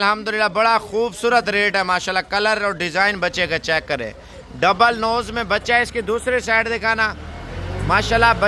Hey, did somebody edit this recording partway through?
no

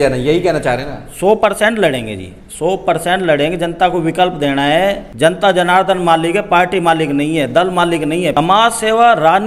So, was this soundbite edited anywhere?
yes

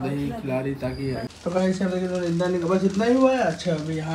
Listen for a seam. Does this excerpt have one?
yes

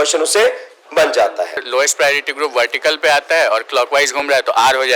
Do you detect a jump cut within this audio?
yes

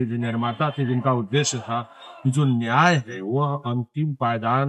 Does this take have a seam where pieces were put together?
no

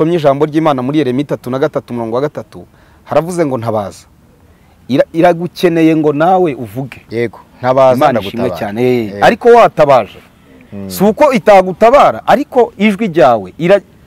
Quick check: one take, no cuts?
yes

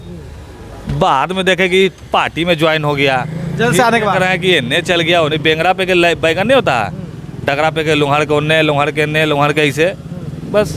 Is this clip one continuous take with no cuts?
yes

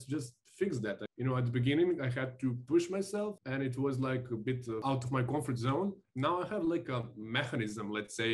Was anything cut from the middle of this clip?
yes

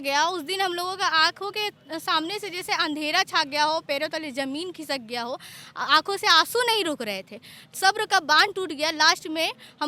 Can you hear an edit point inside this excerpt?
no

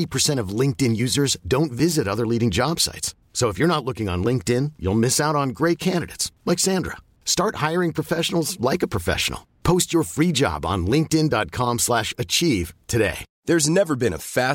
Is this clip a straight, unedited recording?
no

